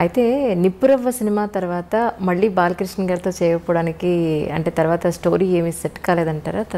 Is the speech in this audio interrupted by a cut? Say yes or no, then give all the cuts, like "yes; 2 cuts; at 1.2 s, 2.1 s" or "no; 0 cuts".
no; 0 cuts